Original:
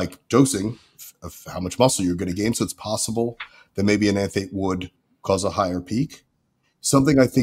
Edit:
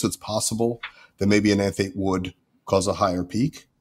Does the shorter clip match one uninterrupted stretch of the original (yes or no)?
yes